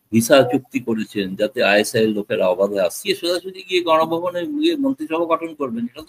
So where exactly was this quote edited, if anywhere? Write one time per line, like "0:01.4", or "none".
0:03.0